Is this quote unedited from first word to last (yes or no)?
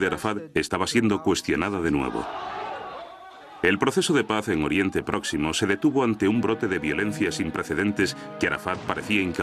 yes